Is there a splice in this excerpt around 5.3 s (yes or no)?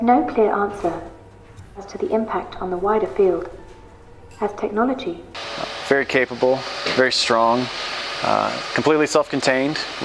yes